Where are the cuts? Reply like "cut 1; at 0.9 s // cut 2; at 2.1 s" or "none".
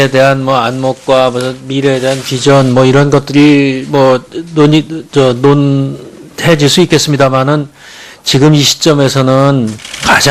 none